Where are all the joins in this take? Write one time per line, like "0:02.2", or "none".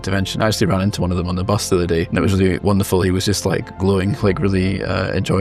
0:02.1